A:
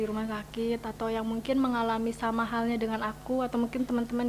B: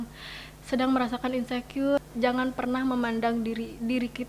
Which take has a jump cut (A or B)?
B